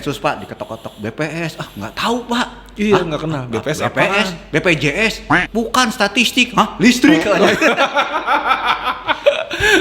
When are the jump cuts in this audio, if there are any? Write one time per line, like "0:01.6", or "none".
none